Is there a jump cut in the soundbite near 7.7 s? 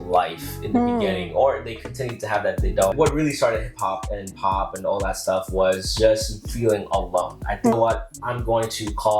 yes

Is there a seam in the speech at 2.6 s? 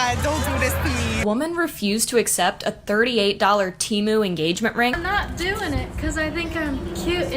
no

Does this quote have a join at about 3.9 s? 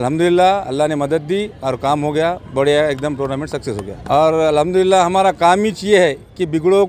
yes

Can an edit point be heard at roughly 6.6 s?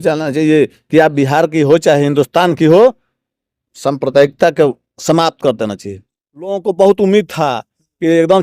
yes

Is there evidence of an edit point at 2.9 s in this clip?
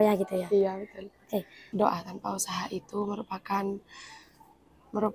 no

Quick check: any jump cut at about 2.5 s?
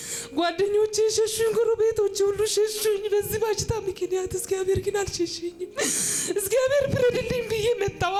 no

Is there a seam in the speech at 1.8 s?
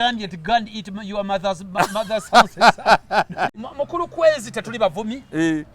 no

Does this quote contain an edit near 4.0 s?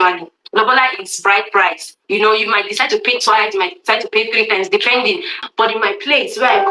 no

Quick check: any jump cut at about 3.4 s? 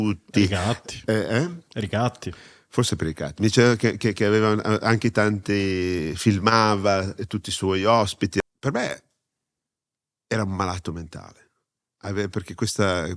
no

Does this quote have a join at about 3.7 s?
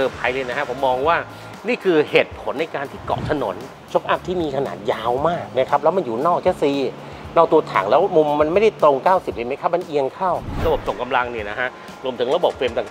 yes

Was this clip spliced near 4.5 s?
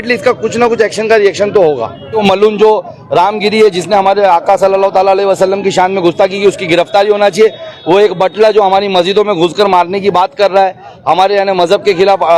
no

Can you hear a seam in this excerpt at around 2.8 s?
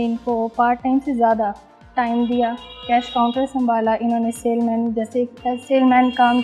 no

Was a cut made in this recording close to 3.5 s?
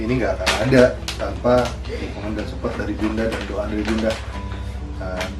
no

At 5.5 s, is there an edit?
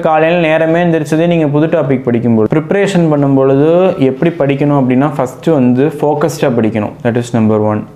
no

